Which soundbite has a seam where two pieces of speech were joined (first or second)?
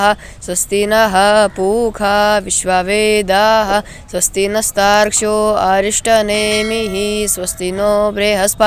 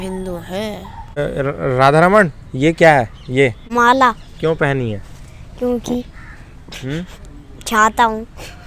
second